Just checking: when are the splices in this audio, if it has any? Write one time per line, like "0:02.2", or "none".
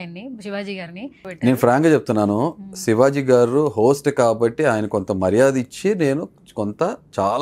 0:01.1